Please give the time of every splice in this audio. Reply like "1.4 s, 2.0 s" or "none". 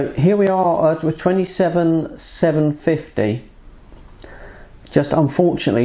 none